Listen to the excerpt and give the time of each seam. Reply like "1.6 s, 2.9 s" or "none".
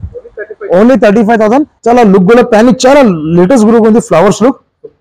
1.7 s